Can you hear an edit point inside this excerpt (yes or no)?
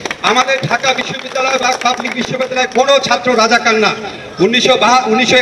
no